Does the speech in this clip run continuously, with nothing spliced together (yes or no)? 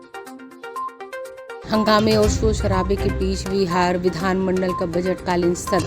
yes